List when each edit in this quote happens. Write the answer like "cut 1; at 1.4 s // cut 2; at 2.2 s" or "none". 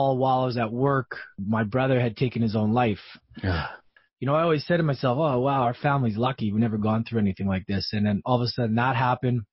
cut 1; at 1.4 s // cut 2; at 3.7 s